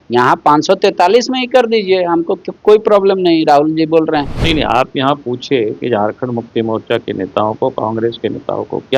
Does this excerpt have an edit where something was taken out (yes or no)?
yes